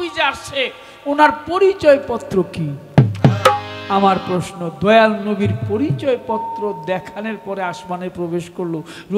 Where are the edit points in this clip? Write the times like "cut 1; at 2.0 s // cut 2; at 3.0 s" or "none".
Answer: none